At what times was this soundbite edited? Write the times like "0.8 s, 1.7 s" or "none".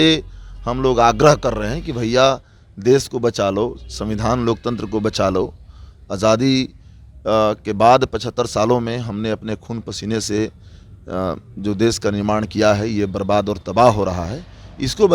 none